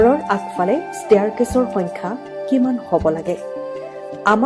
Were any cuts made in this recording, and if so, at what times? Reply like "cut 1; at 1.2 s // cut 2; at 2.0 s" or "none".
cut 1; at 3.5 s